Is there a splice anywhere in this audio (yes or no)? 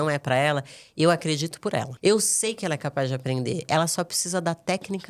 yes